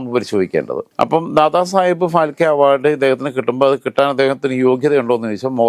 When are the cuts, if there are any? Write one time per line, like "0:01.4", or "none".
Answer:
none